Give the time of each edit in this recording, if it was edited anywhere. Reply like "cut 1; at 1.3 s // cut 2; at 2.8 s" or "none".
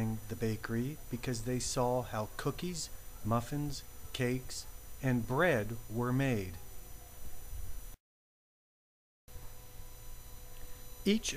none